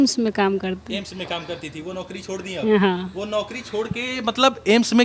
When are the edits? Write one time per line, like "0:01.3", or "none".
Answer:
none

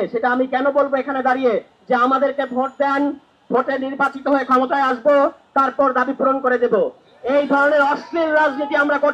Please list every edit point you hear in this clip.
none

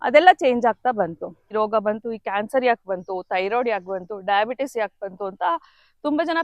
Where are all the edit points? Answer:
0:01.5

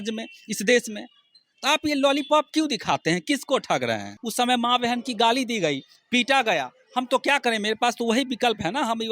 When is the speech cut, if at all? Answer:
0:04.2

